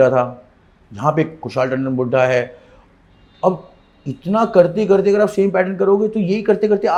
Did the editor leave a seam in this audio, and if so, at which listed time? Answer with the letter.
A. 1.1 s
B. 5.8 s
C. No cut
C